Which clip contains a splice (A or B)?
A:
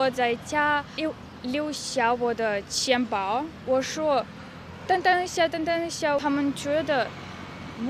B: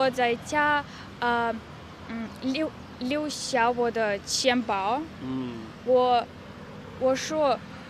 A